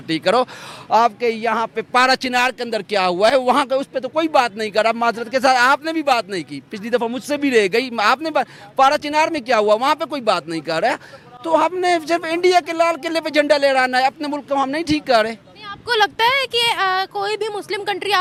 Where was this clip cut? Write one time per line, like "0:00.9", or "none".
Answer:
none